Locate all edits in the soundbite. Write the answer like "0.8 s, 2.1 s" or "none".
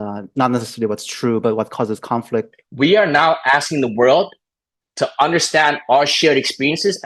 2.5 s